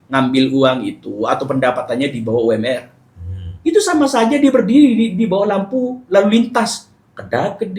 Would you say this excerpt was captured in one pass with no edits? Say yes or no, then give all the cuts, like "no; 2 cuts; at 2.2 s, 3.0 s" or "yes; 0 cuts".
yes; 0 cuts